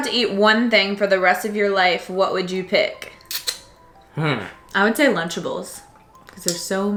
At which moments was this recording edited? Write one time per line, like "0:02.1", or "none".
none